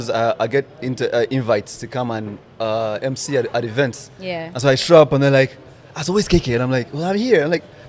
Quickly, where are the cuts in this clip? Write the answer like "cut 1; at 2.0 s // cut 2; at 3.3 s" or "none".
none